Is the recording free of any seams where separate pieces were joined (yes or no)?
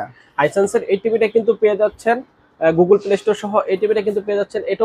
yes